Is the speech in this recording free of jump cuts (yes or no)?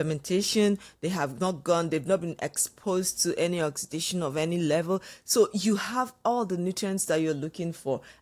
yes